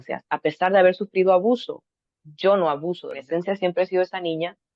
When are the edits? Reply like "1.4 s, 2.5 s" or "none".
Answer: 3.2 s